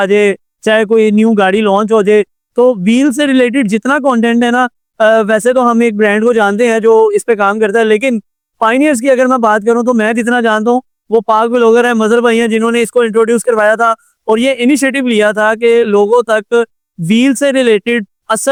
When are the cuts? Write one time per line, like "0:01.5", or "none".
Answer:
none